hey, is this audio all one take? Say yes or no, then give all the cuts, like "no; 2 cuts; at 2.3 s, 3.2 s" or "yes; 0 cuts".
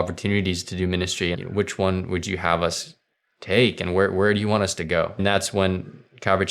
no; 2 cuts; at 1.3 s, 5.2 s